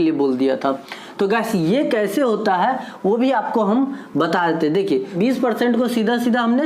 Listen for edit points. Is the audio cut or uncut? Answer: cut